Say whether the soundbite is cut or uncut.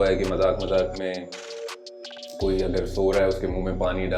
uncut